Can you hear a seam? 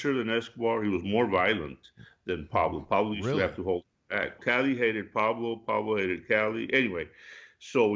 yes; 1 cut; at 4.4 s

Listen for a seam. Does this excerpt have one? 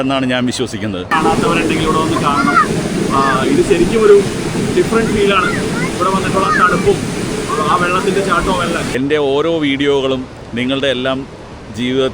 yes; 2 cuts; at 1.1 s, 8.9 s

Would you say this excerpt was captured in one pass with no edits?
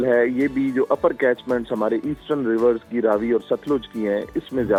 yes; 0 cuts

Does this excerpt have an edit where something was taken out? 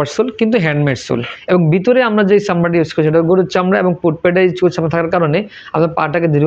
yes; 1 cut; at 1.3 s

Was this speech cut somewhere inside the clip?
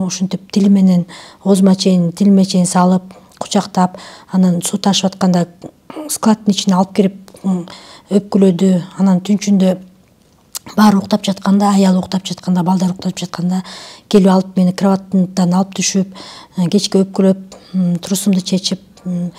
no; 0 cuts

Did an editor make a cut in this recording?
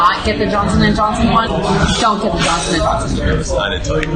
yes; 1 cut; at 1.5 s

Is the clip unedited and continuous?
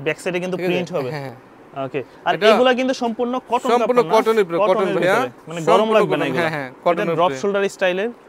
yes; 0 cuts

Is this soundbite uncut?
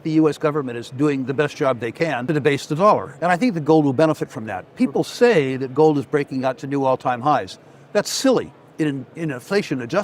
no; 2 cuts; at 2.2 s, 3.1 s

